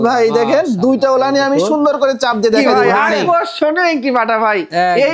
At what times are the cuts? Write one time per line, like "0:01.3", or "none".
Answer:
0:03.2